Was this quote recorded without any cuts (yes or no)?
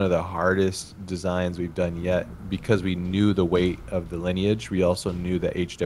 yes